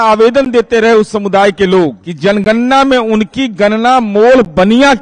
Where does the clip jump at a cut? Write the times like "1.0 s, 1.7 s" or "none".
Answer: 2.0 s